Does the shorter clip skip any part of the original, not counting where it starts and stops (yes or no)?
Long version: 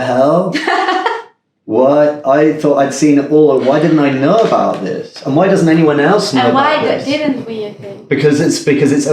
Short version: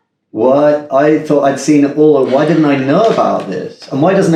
no